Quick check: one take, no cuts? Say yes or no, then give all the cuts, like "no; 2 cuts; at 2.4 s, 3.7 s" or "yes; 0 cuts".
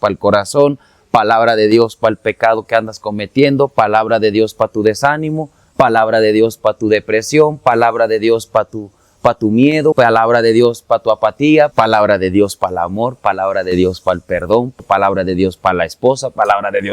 no; 3 cuts; at 9.9 s, 11.7 s, 14.7 s